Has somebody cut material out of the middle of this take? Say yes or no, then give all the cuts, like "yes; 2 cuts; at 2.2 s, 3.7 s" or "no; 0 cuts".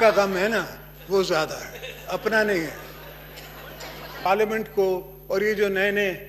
yes; 1 cut; at 4.2 s